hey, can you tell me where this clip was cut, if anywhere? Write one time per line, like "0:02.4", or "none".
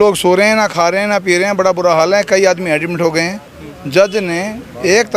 none